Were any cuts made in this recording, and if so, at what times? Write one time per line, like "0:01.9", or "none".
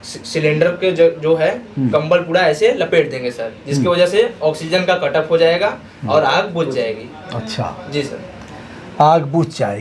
none